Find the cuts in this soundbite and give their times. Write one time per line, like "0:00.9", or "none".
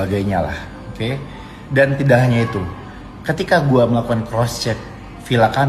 0:04.0